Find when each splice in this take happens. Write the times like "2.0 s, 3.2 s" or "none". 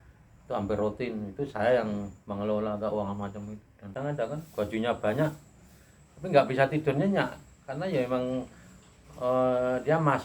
3.8 s